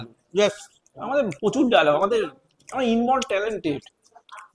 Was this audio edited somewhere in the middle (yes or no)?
no